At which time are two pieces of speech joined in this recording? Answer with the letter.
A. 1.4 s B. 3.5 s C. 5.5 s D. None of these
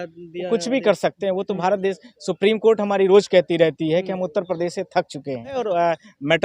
C